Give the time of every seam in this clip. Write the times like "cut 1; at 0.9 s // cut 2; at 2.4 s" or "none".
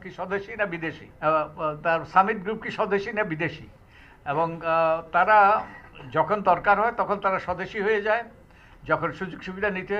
cut 1; at 1.1 s